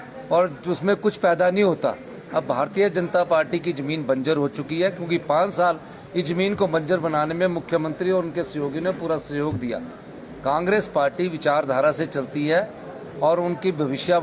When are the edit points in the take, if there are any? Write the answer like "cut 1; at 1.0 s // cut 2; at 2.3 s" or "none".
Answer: none